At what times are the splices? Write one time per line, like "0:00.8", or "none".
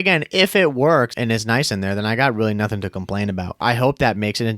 0:01.1
0:03.6